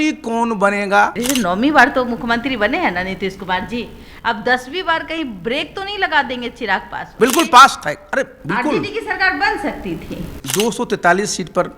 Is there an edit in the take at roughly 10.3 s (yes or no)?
yes